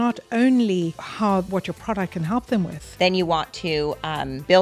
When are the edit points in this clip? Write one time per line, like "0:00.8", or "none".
0:02.8